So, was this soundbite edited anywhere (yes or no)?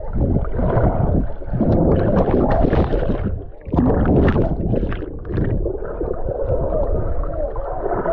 no